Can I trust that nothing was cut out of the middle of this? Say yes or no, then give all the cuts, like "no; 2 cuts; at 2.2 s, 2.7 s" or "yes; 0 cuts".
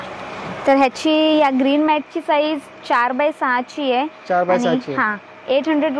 yes; 0 cuts